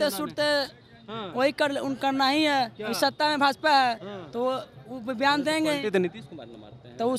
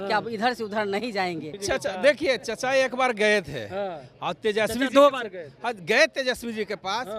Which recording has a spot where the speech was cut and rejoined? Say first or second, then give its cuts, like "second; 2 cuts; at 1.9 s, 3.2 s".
second; 1 cut; at 1.6 s